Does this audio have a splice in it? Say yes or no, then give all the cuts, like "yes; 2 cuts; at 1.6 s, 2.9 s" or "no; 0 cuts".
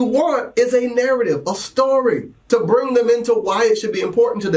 no; 0 cuts